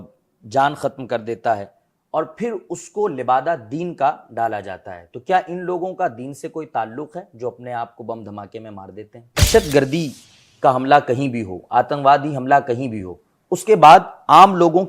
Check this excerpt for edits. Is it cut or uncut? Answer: cut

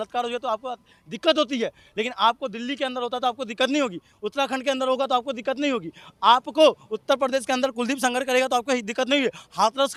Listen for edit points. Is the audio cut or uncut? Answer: uncut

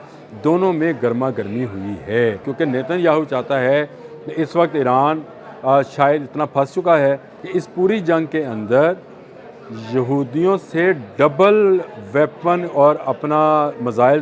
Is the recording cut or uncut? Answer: cut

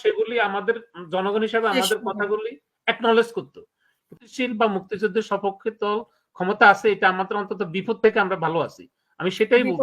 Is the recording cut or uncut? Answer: cut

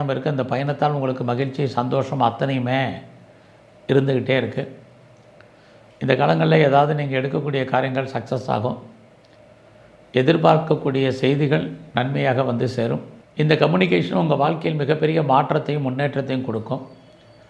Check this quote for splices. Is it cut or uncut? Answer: cut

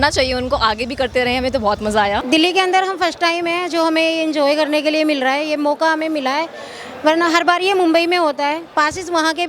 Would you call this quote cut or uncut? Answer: cut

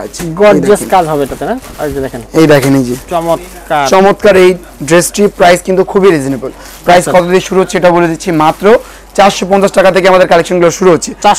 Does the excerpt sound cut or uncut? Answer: uncut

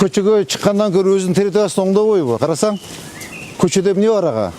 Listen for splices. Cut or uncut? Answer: uncut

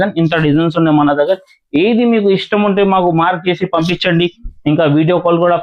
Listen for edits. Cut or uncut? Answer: uncut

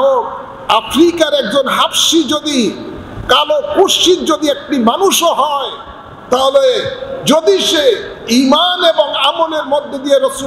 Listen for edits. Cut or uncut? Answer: uncut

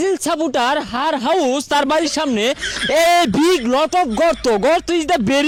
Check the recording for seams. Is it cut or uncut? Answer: uncut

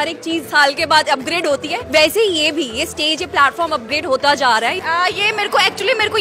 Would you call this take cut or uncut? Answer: cut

